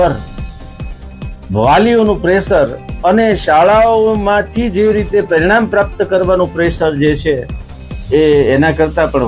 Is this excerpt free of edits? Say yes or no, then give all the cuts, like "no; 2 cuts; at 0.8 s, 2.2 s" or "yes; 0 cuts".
yes; 0 cuts